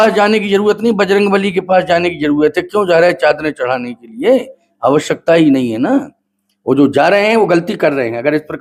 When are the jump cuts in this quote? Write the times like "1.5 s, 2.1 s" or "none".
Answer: none